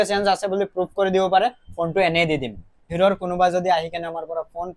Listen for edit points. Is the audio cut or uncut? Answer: cut